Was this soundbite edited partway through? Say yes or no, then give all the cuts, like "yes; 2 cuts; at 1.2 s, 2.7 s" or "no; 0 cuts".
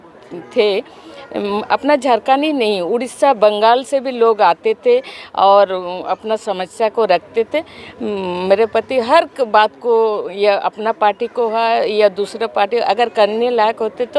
no; 0 cuts